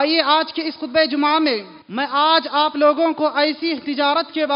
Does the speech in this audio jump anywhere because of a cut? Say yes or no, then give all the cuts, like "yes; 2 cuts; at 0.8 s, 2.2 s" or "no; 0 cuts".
yes; 1 cut; at 1.8 s